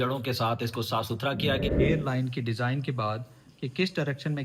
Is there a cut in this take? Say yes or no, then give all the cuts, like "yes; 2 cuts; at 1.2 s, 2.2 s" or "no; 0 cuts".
yes; 1 cut; at 1.7 s